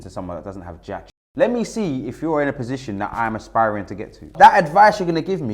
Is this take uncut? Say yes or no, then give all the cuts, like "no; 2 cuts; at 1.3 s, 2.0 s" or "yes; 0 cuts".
no; 2 cuts; at 1.2 s, 4.3 s